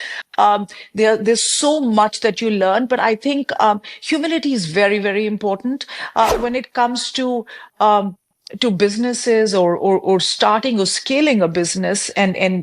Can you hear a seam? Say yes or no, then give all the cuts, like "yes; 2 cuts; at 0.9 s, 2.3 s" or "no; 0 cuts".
yes; 1 cut; at 6.3 s